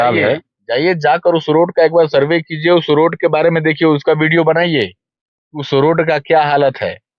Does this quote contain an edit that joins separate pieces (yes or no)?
no